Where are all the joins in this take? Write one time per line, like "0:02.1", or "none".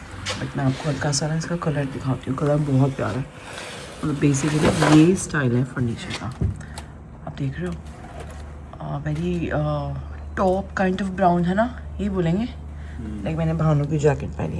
none